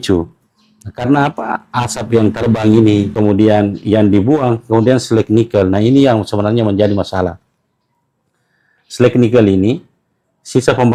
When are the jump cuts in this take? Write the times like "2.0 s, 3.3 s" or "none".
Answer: none